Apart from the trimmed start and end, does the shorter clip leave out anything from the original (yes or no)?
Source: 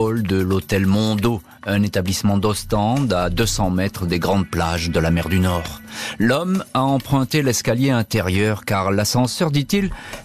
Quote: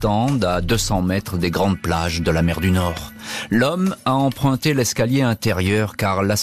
no